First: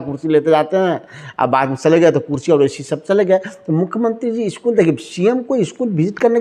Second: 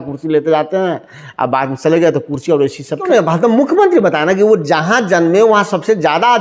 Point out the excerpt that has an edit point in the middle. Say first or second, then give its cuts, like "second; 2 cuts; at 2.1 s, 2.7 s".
second; 1 cut; at 3.1 s